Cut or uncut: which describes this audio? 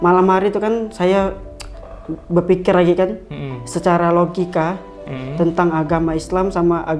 uncut